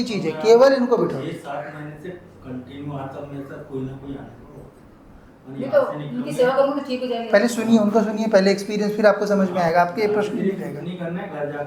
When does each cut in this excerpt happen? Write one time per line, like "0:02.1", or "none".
none